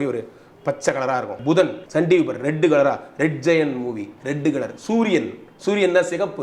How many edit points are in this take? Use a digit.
1